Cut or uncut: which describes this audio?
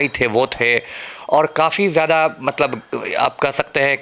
uncut